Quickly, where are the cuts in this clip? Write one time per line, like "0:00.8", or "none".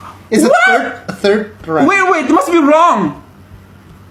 none